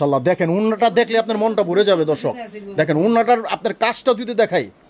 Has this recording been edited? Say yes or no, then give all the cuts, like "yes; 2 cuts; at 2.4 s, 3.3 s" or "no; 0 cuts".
no; 0 cuts